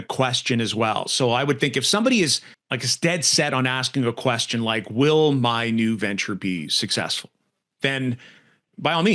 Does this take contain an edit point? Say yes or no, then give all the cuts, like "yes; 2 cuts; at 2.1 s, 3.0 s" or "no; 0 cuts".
no; 0 cuts